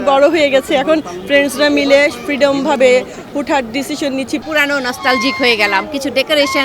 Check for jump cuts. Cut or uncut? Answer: cut